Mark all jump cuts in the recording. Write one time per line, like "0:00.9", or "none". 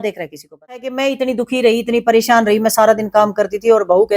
0:00.9